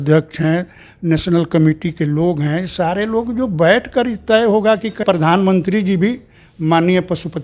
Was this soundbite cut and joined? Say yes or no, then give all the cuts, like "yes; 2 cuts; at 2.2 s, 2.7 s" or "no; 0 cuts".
yes; 1 cut; at 5.0 s